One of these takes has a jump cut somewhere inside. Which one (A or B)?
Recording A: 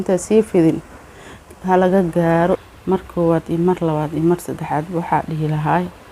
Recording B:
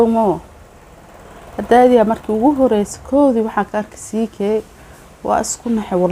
A